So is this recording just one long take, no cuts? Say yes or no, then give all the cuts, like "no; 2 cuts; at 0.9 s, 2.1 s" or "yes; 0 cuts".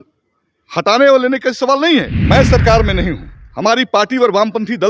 no; 1 cut; at 2.2 s